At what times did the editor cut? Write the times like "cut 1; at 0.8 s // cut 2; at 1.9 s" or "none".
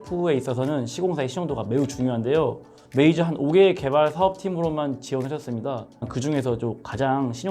cut 1; at 2.8 s // cut 2; at 6.1 s